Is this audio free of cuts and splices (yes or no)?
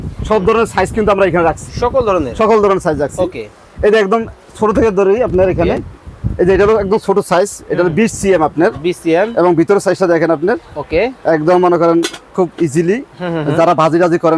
yes